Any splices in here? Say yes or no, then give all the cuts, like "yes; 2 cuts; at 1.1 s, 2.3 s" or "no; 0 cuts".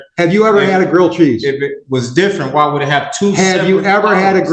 no; 0 cuts